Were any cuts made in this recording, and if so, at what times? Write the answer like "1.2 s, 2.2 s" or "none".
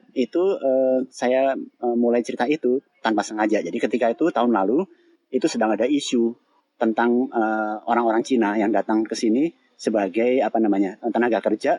none